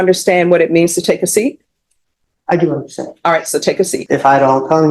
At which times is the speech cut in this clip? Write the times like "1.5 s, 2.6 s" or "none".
4.0 s